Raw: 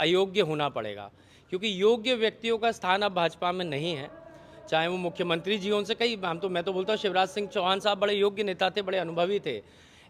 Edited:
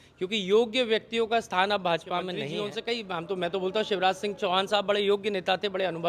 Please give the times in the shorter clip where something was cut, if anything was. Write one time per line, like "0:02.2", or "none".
0:02.5